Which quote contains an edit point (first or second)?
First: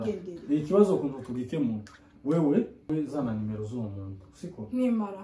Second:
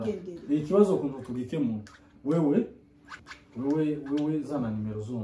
first